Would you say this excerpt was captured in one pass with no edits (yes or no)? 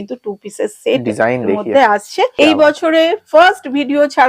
no